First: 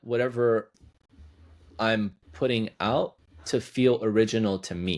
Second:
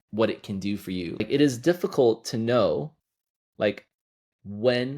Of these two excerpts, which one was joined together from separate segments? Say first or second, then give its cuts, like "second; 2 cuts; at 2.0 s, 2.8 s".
second; 1 cut; at 1.2 s